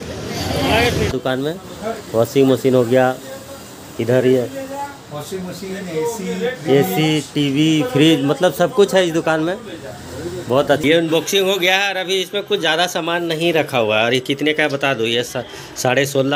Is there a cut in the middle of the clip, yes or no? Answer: yes